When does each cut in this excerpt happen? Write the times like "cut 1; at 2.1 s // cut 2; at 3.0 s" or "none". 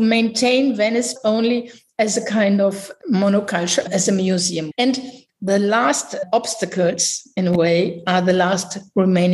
cut 1; at 1.1 s // cut 2; at 4.6 s

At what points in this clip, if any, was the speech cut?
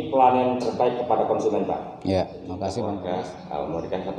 cut 1; at 3.0 s

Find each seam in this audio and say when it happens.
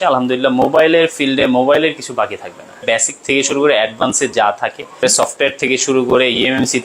cut 1; at 2.8 s // cut 2; at 5.0 s

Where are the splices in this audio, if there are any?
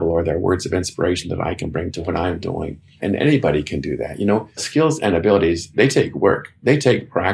cut 1; at 1.9 s // cut 2; at 4.6 s // cut 3; at 5.7 s

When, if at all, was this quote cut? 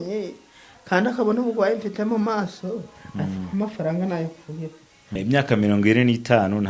cut 1; at 4.9 s

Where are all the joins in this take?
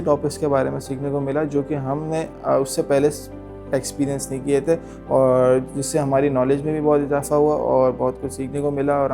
none

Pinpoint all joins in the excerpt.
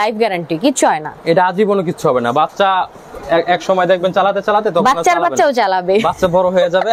none

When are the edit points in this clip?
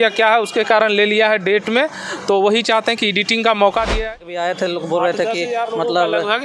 cut 1; at 4.0 s

